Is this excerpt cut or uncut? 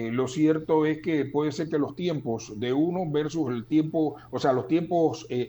uncut